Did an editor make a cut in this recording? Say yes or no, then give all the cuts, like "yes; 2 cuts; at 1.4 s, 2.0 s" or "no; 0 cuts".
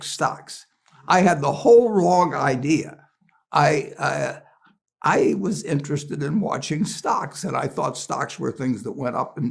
no; 0 cuts